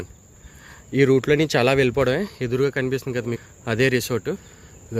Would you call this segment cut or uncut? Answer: uncut